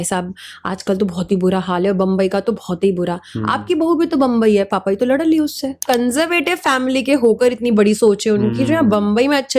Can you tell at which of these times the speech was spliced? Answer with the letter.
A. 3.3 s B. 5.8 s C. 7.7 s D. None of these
B